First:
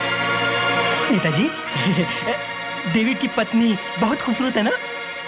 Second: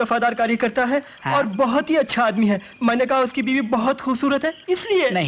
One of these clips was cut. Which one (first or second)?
first